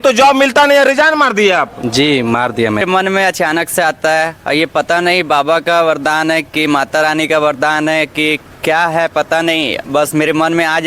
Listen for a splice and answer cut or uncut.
cut